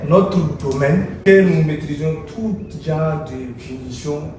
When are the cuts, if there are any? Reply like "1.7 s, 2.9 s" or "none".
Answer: 1.2 s